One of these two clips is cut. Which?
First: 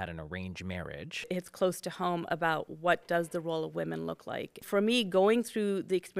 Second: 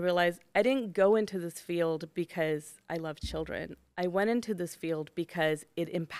first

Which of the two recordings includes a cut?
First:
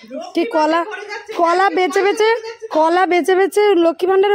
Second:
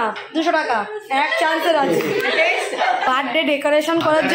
second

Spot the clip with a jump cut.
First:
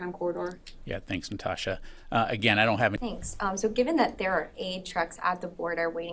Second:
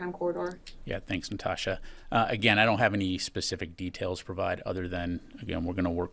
second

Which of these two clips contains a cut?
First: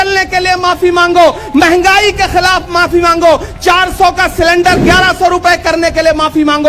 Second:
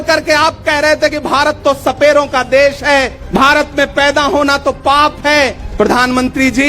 second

